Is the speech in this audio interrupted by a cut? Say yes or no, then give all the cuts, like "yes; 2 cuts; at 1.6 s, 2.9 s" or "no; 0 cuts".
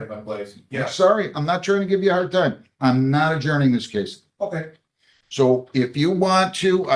no; 0 cuts